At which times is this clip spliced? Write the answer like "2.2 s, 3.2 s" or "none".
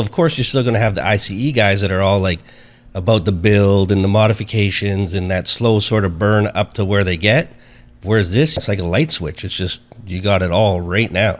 8.6 s